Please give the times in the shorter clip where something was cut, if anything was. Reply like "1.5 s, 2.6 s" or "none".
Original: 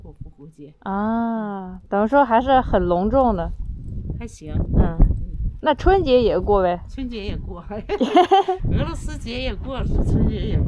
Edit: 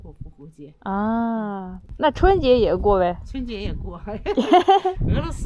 1.7 s